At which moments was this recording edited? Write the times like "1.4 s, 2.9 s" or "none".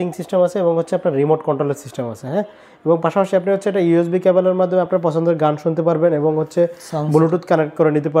none

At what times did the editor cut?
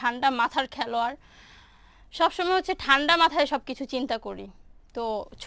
none

